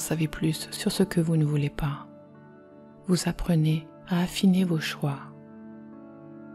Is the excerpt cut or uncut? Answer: cut